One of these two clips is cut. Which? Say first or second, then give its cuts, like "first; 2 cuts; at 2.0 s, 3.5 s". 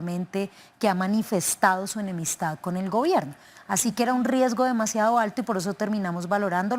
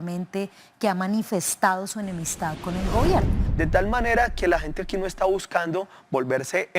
second; 1 cut; at 3.4 s